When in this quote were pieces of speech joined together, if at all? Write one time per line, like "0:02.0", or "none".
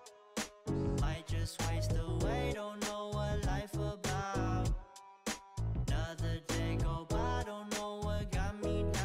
none